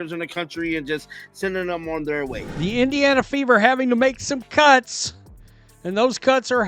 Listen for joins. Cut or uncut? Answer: cut